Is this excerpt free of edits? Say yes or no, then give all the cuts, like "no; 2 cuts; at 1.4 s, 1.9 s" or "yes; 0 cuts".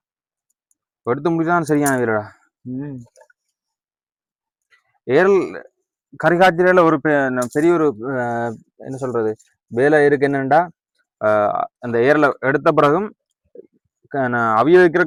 yes; 0 cuts